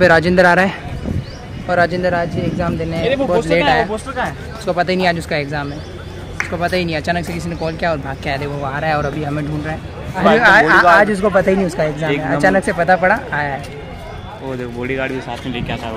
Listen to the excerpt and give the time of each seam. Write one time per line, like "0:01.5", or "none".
none